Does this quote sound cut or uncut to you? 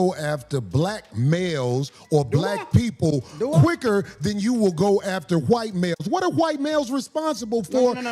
uncut